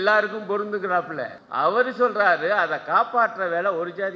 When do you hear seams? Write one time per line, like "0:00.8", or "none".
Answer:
0:01.4